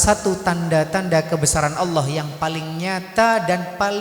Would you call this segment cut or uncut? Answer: uncut